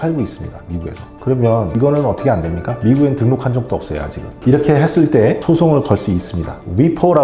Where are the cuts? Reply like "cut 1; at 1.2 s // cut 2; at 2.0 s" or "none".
none

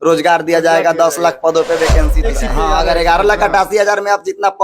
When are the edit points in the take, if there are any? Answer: cut 1; at 2.3 s

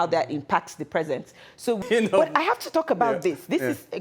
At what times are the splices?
cut 1; at 1.8 s

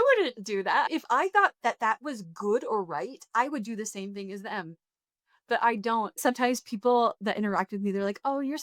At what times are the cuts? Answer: cut 1; at 0.9 s // cut 2; at 6.2 s

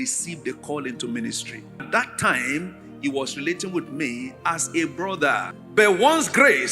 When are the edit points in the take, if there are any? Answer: cut 1; at 1.9 s // cut 2; at 5.6 s

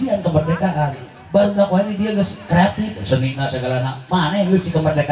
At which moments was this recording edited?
none

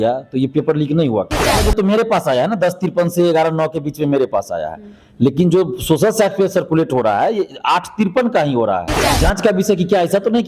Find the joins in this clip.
cut 1; at 1.6 s // cut 2; at 9.2 s

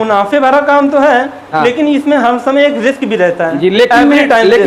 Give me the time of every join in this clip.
none

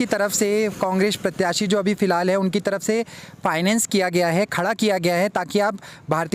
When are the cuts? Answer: none

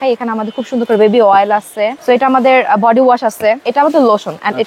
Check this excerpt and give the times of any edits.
cut 1; at 2.0 s // cut 2; at 3.6 s

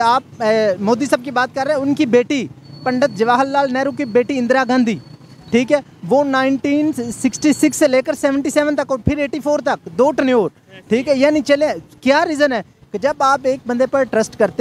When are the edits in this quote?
none

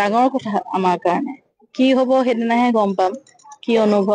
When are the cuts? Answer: cut 1; at 1.1 s

